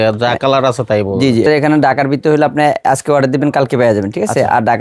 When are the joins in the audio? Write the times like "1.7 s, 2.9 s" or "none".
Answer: 1.5 s